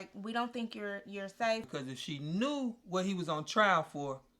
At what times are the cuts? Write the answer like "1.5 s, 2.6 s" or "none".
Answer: 1.7 s